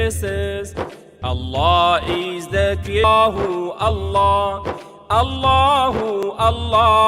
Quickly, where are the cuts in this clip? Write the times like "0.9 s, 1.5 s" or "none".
1.0 s, 3.0 s